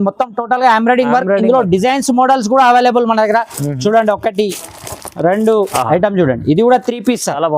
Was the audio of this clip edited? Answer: yes; 1 cut; at 5.7 s

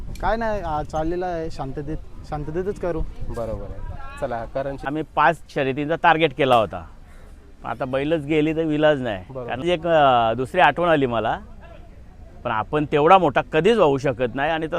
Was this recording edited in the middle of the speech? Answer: yes; 2 cuts; at 4.9 s, 9.6 s

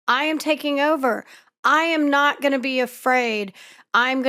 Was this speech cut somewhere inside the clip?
no; 0 cuts

